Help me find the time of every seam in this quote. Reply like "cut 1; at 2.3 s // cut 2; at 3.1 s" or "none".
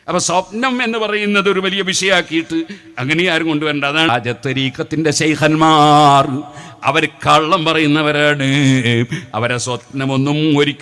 cut 1; at 4.1 s